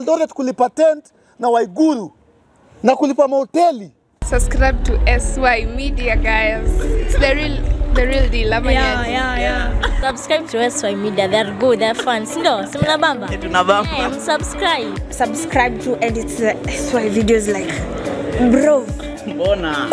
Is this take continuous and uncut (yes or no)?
no